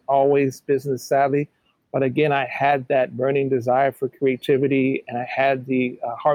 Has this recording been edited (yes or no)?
no